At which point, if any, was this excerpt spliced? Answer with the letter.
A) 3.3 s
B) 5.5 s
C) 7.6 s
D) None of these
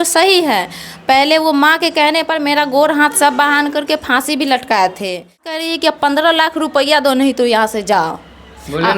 B